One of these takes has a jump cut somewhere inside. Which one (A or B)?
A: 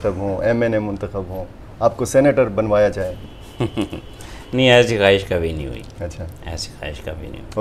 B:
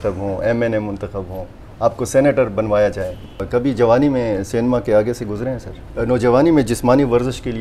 B